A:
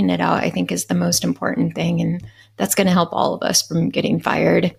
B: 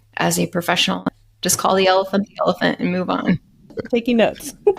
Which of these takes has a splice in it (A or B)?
B